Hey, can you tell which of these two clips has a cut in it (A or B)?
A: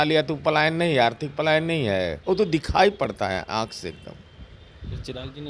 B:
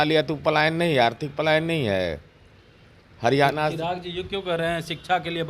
A